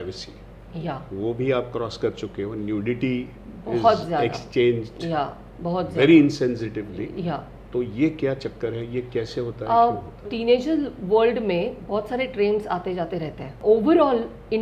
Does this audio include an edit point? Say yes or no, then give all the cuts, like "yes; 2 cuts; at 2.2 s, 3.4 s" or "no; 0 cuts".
yes; 2 cuts; at 10.3 s, 13.6 s